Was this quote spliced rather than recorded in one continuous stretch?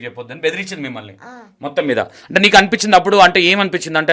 no; 0 cuts

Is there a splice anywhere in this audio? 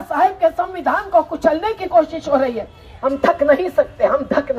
yes; 1 cut; at 2.9 s

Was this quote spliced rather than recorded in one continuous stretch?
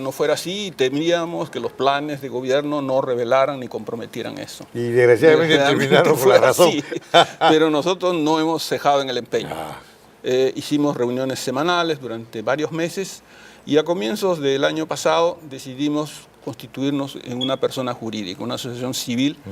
yes; 1 cut; at 5.9 s

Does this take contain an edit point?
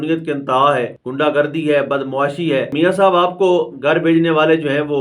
yes; 2 cuts; at 1.0 s, 2.7 s

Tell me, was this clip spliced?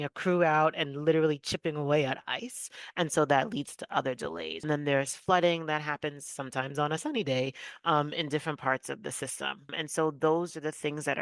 yes; 2 cuts; at 4.7 s, 9.7 s

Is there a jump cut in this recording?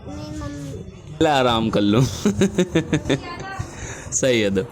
yes; 1 cut; at 1.2 s

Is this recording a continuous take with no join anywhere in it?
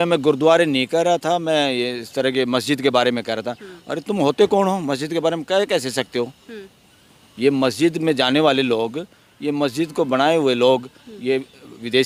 yes; 0 cuts

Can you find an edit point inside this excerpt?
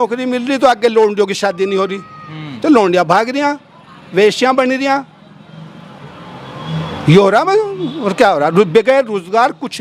no; 0 cuts

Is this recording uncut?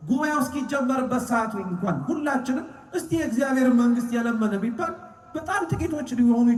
yes; 0 cuts

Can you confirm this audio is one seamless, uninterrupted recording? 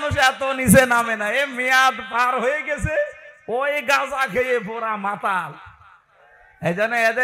yes; 0 cuts

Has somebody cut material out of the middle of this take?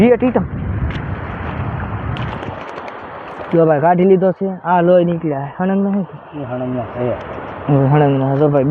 no; 0 cuts

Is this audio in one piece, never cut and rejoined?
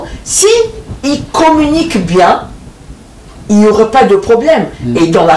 yes; 0 cuts

